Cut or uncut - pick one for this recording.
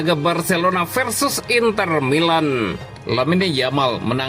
cut